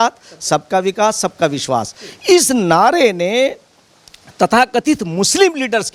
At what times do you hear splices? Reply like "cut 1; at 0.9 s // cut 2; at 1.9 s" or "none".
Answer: none